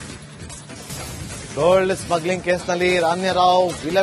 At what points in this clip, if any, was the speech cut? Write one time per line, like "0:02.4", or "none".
0:01.1